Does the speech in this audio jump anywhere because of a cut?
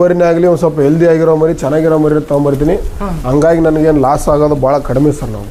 no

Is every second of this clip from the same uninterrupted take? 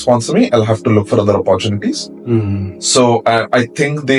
yes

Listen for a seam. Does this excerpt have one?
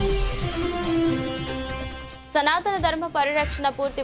yes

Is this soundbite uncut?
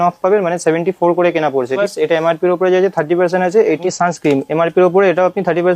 no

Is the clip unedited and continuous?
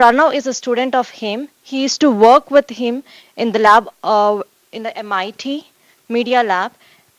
yes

